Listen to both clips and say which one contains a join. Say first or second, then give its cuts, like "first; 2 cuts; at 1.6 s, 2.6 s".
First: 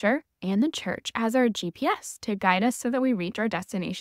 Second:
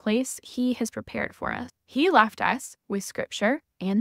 second; 1 cut; at 1.6 s